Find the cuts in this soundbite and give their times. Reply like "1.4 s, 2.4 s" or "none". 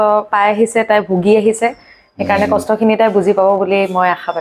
none